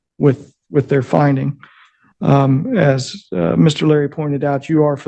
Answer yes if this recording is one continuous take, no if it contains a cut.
yes